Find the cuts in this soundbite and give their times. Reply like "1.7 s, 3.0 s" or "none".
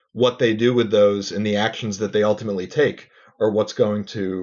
none